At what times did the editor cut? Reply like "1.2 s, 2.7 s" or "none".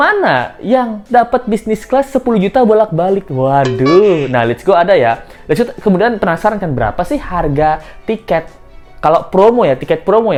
none